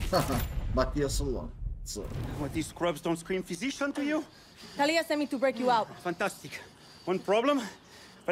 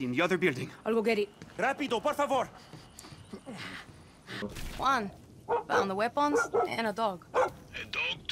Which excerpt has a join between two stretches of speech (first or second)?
second